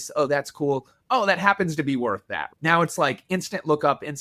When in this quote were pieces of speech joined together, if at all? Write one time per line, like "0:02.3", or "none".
0:02.5